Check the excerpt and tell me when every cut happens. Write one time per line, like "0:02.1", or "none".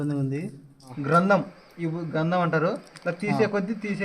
0:00.9